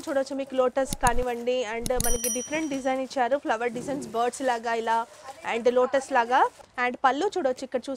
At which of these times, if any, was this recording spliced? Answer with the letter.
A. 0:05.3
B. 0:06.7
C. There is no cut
B